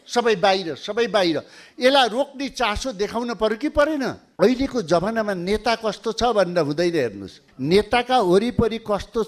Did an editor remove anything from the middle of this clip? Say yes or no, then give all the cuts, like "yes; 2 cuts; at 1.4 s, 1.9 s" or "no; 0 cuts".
yes; 1 cut; at 4.2 s